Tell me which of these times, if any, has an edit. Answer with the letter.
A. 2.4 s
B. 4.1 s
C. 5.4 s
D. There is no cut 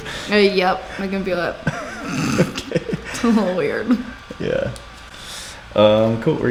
D